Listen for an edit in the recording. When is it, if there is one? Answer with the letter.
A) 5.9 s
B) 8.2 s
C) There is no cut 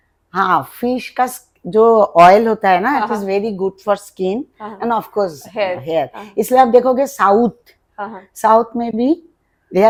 C